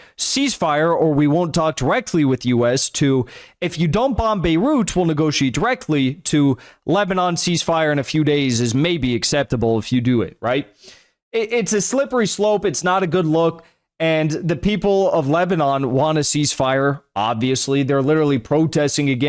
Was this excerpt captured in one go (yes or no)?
yes